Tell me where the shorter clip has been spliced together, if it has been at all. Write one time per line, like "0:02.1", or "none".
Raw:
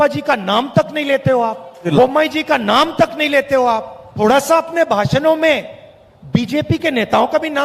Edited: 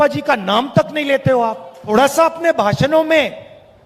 0:01.7